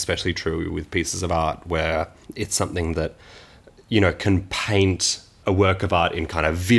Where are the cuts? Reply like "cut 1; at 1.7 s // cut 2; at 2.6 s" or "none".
cut 1; at 2.2 s // cut 2; at 5.4 s